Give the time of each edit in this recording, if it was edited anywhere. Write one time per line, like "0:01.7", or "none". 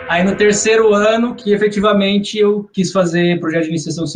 0:01.4
0:02.7

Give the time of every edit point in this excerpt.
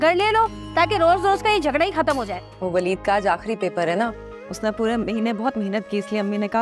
0:02.4

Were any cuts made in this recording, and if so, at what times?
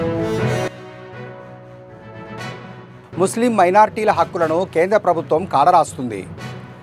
0:02.6

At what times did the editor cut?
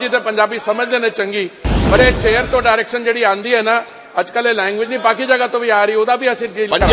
none

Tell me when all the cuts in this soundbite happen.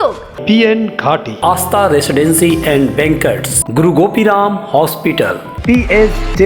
none

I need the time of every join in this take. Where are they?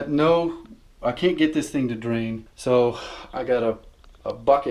0:02.5

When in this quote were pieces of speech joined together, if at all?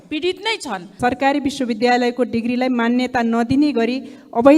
0:00.9

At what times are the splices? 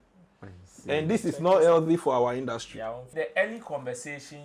0:03.1

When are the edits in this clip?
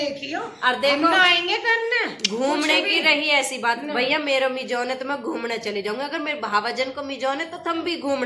none

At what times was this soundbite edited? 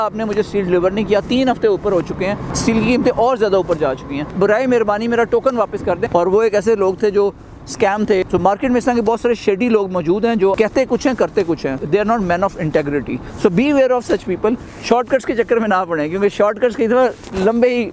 0:02.5
0:04.3
0:06.0
0:08.2
0:10.6
0:11.7
0:13.2
0:14.7

